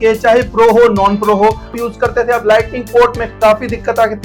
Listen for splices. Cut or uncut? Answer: cut